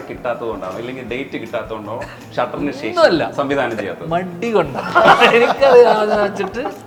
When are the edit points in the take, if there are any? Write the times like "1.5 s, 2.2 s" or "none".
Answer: none